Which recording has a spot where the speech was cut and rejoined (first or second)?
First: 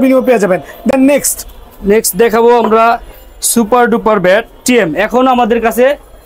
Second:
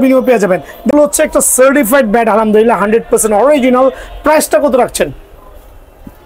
second